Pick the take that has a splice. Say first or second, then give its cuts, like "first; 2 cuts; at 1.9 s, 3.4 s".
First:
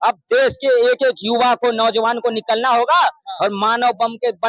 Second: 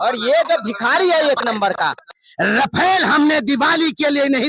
second; 1 cut; at 2.1 s